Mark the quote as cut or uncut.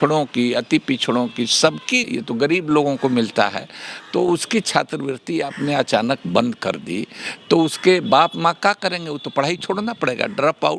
cut